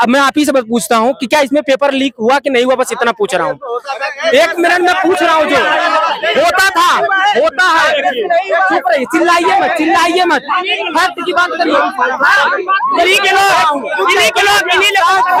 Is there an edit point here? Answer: no; 0 cuts

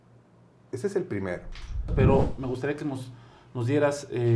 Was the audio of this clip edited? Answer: yes; 1 cut; at 1.9 s

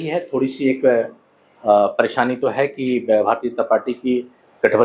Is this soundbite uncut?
yes; 0 cuts

